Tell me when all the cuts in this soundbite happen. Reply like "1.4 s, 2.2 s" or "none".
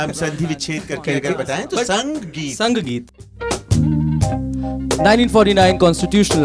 3.1 s